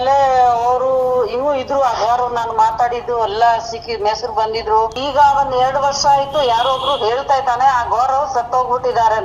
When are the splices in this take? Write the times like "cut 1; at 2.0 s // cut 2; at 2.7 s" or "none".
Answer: cut 1; at 5.0 s